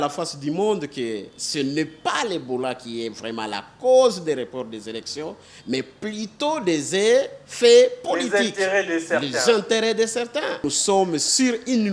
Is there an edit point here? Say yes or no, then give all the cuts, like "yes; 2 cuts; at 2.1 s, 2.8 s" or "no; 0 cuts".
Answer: yes; 1 cut; at 10.7 s